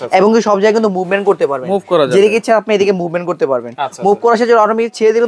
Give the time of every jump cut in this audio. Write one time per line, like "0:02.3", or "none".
none